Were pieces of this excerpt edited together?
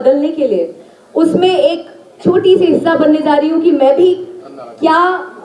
no; 0 cuts

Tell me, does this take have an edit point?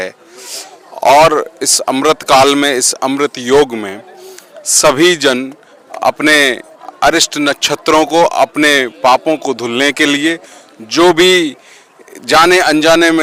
no; 0 cuts

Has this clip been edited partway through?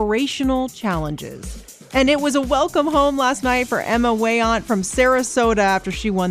no; 0 cuts

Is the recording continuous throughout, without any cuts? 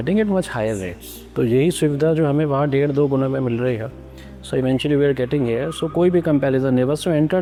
yes; 0 cuts

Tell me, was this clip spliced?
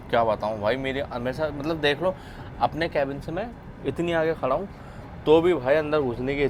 no; 0 cuts

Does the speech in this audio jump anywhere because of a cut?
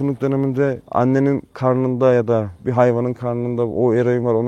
yes; 3 cuts; at 0.8 s, 1.5 s, 2.6 s

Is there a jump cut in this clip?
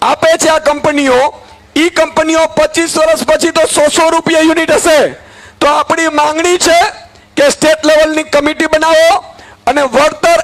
no; 0 cuts

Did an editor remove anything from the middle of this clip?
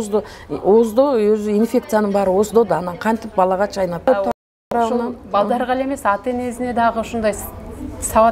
no; 0 cuts

